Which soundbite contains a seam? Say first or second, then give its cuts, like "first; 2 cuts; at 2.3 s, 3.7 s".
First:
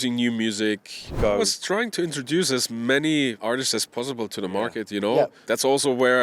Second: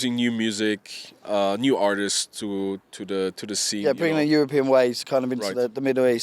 first; 3 cuts; at 1.1 s, 3.4 s, 5.4 s